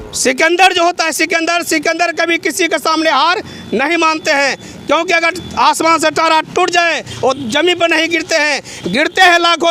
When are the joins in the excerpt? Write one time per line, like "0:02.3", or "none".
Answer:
none